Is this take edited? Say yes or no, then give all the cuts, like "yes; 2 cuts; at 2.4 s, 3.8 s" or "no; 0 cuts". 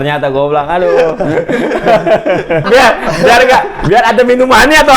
yes; 1 cut; at 2.6 s